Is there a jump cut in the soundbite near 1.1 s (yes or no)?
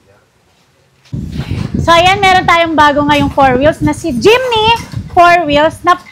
yes